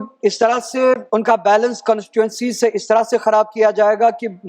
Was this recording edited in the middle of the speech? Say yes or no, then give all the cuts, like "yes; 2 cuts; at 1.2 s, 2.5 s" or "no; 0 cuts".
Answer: yes; 1 cut; at 1.0 s